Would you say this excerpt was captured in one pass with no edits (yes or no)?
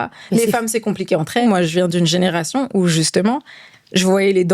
no